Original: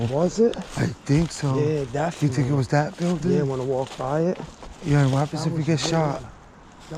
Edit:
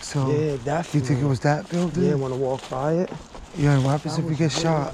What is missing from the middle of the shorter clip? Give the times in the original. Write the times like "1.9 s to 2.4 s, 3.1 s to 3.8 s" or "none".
none